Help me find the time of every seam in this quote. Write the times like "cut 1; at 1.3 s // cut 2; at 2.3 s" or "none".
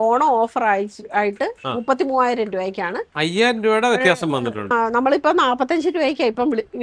cut 1; at 4.7 s